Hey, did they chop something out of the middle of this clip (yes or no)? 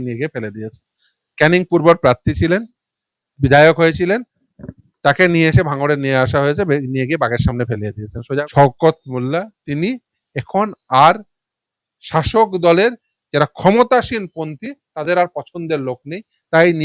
yes